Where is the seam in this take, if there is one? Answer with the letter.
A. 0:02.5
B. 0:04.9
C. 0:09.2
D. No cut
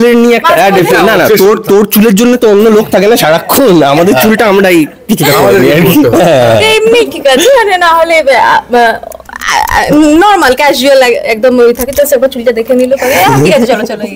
D